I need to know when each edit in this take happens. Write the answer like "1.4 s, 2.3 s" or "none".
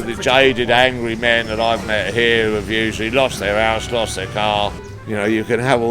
4.9 s